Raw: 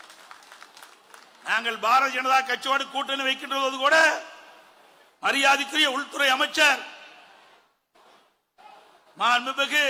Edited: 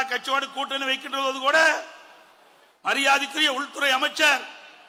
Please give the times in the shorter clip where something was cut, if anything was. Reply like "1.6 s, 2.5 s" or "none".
none